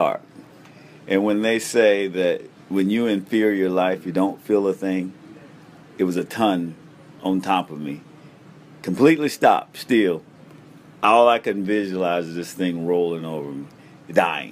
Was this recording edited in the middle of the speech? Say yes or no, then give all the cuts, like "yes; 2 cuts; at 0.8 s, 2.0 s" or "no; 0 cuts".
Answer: no; 0 cuts